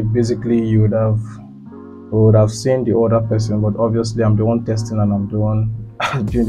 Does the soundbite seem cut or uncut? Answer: uncut